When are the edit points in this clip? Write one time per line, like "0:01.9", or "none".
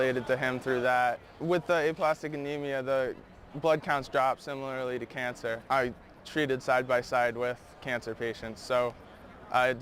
none

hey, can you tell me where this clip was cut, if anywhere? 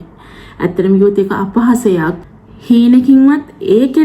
0:02.2

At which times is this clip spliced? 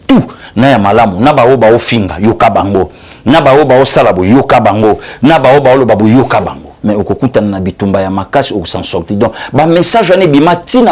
0:06.7

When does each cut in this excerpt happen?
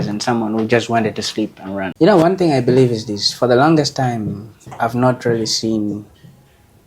0:01.9

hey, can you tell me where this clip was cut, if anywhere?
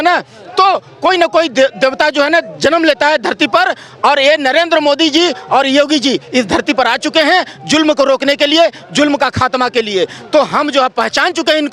none

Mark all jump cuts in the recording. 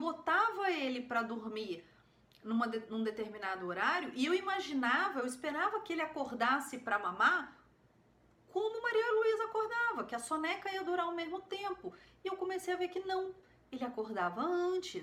none

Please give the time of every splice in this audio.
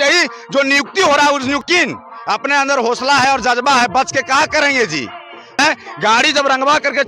0:01.6
0:05.6

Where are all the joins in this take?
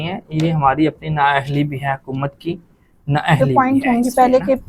0:03.5

